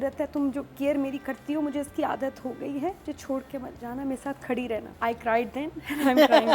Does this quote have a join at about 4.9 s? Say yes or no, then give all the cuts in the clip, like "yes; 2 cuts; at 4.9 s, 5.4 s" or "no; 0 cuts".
yes; 2 cuts; at 3.0 s, 4.9 s